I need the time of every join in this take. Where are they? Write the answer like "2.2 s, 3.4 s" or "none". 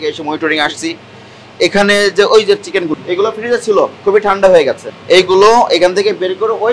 2.9 s, 4.9 s

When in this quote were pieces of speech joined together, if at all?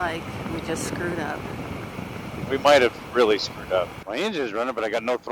4.0 s

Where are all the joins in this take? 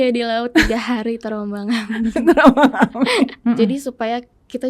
3.4 s

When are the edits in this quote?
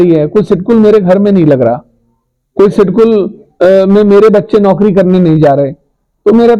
none

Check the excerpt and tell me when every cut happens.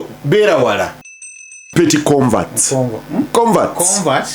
1.6 s

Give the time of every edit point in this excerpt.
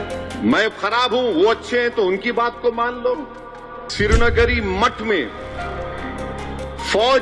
3.8 s

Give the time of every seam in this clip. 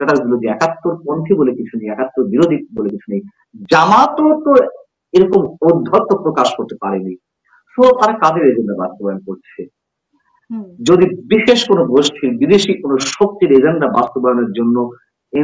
none

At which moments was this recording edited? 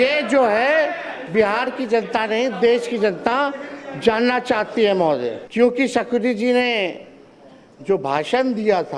5.4 s

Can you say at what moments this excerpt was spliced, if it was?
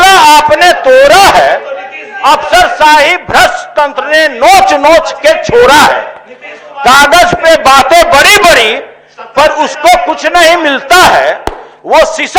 none

